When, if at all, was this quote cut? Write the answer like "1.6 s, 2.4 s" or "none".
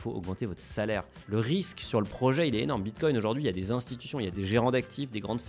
1.2 s